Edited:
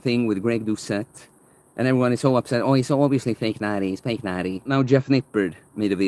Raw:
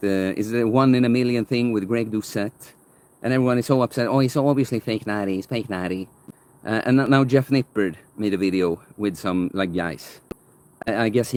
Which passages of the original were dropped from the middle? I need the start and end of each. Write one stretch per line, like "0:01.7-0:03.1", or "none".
0:06.1-0:07.1

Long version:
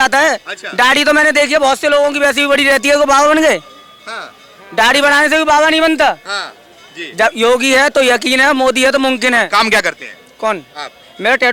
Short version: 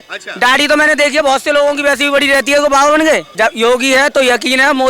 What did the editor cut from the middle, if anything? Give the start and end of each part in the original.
0:03.6-0:07.1

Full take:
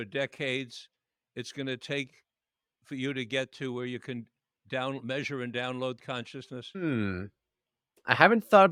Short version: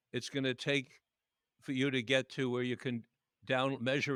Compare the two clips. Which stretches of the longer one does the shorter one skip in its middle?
none

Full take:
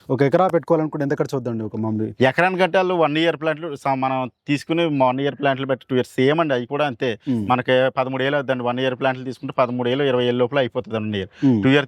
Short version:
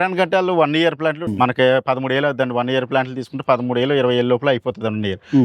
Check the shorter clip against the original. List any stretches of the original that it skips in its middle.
0:03.7-0:07.4

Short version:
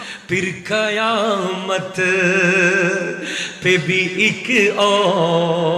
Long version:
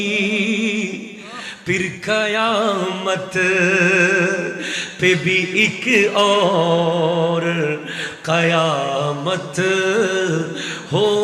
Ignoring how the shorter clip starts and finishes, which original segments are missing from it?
none

